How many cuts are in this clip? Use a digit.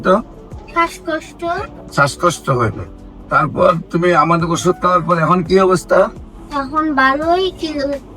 1